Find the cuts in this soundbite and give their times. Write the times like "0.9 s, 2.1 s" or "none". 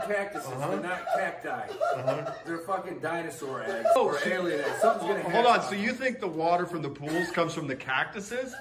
4.2 s